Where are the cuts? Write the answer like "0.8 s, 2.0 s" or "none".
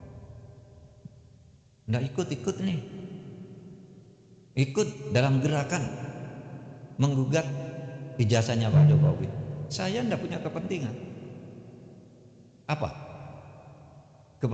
none